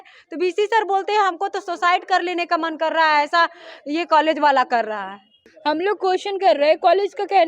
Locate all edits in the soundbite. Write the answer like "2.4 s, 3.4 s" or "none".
5.3 s